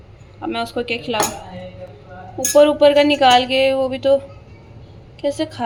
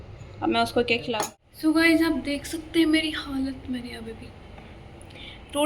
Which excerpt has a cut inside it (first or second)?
second